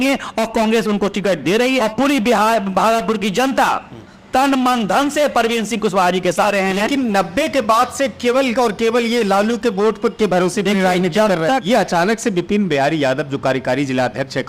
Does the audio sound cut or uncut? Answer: cut